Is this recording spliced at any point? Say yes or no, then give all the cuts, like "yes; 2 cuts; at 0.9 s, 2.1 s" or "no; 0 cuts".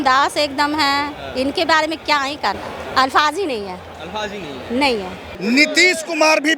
yes; 2 cuts; at 2.7 s, 5.3 s